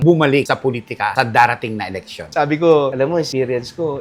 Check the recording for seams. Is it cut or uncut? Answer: uncut